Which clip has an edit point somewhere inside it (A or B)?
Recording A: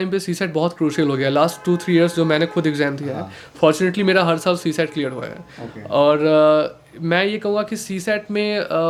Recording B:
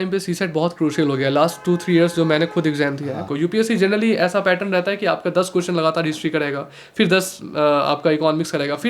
B